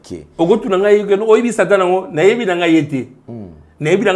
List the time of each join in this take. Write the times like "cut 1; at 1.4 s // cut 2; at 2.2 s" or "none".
none